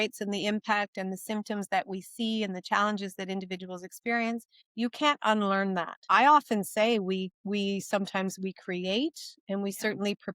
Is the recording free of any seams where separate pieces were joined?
no; 1 cut; at 6.0 s

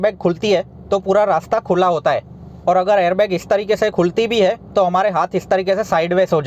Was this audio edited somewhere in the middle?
no; 0 cuts

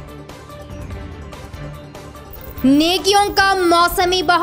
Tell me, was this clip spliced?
no; 0 cuts

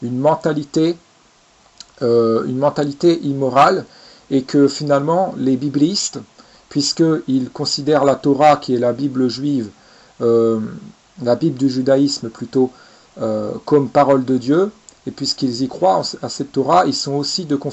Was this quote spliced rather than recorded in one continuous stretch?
yes; 1 cut; at 3.5 s

